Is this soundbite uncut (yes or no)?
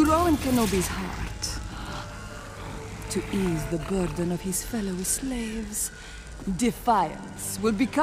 no